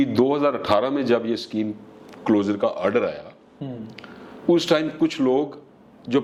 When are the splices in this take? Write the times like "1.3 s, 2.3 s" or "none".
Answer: none